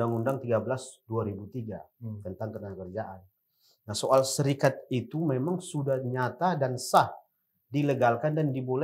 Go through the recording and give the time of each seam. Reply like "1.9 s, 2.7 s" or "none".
none